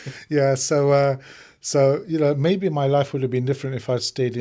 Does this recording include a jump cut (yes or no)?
no